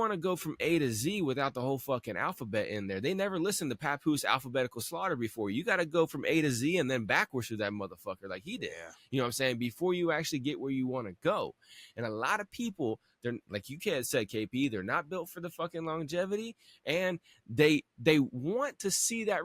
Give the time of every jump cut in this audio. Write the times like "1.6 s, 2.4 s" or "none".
none